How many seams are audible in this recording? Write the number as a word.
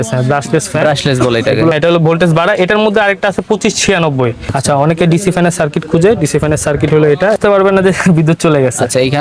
three